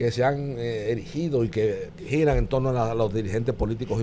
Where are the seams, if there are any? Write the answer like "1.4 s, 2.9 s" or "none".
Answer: 1.9 s